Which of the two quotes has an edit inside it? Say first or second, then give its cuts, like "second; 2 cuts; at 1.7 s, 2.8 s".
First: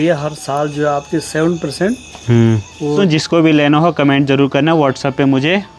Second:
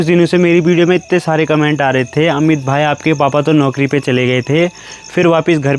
first; 1 cut; at 3.0 s